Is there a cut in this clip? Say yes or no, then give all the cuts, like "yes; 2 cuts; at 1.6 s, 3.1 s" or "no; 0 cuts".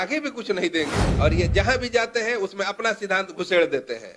yes; 1 cut; at 1.0 s